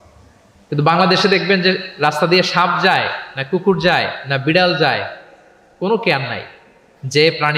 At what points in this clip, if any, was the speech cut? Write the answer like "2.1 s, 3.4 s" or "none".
none